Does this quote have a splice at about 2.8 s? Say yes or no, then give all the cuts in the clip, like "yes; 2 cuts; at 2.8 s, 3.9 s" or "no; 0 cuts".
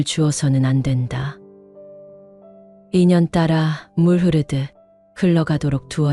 yes; 2 cuts; at 1.3 s, 2.8 s